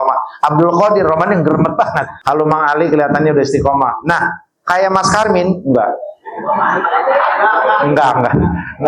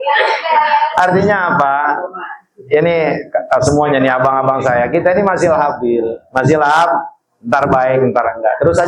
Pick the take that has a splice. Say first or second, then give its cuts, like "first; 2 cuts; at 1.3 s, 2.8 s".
first; 1 cut; at 2.1 s